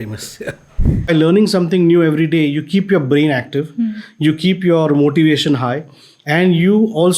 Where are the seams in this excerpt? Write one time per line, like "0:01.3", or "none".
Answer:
0:01.1